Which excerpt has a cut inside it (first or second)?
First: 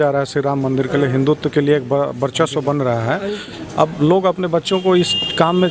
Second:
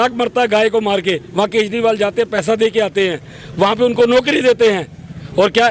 first